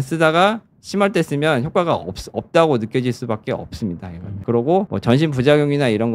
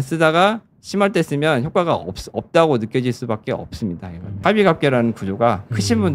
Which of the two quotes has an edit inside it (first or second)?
second